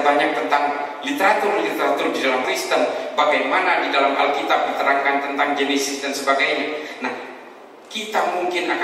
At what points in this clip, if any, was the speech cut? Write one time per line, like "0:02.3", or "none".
0:02.5